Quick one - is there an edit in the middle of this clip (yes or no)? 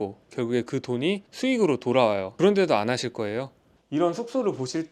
yes